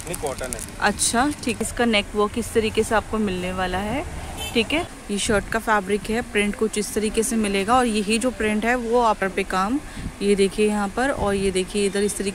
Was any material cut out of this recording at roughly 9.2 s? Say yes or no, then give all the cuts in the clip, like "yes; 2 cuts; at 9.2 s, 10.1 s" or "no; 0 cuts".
yes; 3 cuts; at 1.6 s, 5.0 s, 9.2 s